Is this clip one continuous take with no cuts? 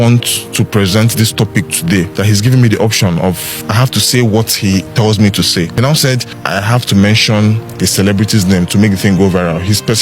no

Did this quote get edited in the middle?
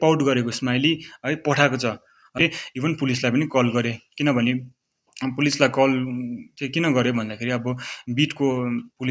yes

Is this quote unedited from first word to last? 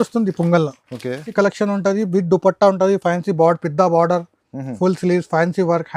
no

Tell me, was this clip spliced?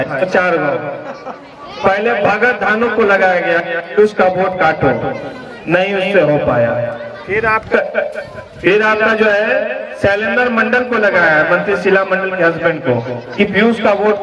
no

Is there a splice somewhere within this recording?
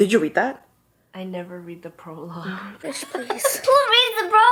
no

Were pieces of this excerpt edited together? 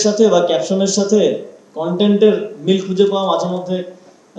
no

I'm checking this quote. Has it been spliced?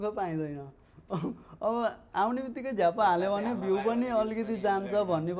no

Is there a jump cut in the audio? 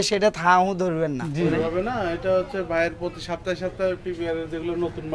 yes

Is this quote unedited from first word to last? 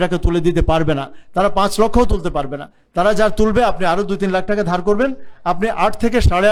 yes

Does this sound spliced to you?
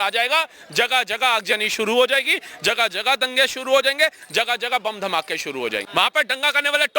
yes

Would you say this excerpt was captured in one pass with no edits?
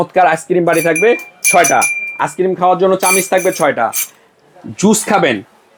yes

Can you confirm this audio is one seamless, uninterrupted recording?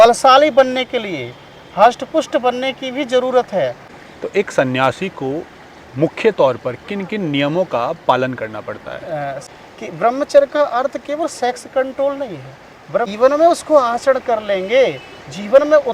no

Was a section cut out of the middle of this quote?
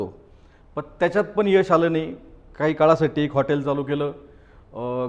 no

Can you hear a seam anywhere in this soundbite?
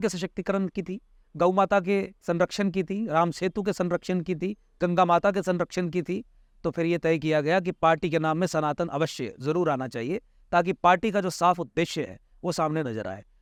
no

